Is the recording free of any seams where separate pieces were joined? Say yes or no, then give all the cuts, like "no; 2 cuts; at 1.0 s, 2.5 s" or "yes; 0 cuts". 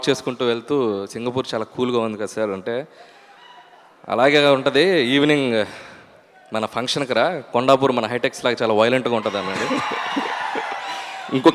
yes; 0 cuts